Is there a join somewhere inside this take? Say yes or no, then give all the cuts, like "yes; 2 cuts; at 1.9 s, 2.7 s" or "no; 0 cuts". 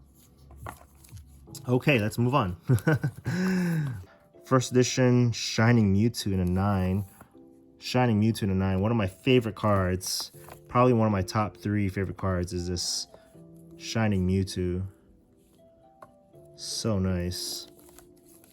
yes; 1 cut; at 4.0 s